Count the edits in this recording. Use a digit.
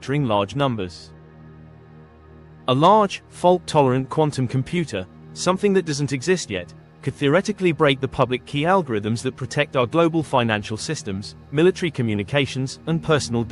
0